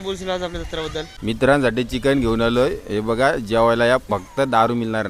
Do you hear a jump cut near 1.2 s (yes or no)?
no